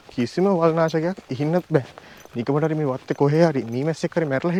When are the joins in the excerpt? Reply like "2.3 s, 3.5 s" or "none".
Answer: none